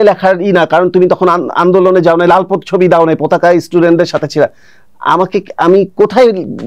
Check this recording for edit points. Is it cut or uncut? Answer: uncut